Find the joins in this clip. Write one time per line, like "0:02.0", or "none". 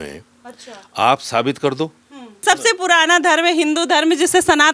0:02.4